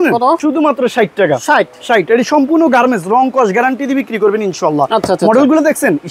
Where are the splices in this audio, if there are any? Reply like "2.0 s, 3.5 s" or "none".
none

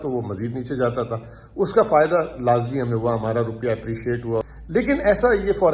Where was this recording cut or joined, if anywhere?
4.6 s

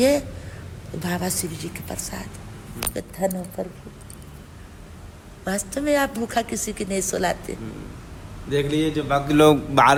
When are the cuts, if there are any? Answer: none

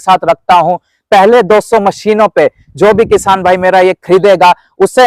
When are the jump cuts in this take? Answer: none

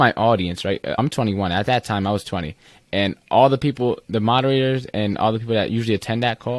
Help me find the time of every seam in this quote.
1.0 s

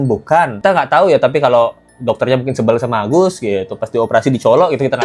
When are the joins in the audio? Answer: none

